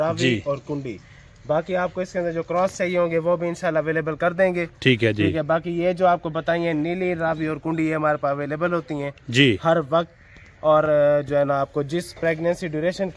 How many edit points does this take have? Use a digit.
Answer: 0